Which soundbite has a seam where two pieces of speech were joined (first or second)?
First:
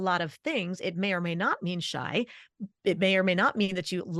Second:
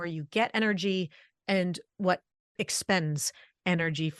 second